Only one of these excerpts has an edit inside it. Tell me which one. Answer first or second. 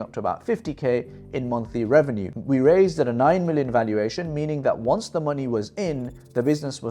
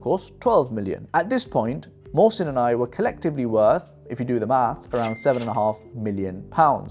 first